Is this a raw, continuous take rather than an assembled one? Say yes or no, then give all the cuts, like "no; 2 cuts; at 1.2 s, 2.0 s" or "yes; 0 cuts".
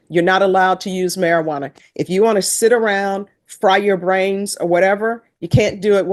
yes; 0 cuts